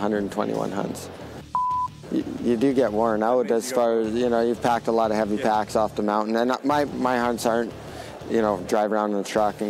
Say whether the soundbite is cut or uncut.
cut